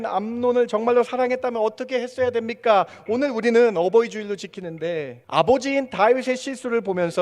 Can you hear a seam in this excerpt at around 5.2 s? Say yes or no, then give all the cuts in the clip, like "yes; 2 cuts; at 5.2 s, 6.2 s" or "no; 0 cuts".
yes; 1 cut; at 5.2 s